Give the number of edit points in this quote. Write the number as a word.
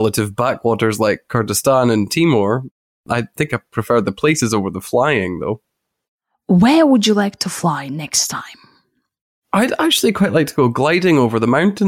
one